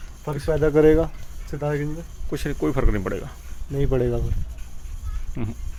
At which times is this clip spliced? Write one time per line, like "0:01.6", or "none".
none